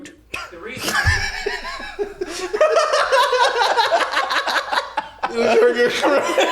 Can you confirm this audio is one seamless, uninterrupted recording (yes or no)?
no